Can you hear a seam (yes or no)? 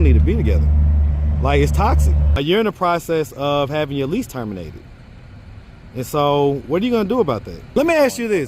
yes